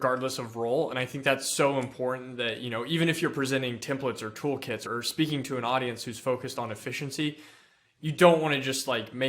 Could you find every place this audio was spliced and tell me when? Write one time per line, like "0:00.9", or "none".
0:04.8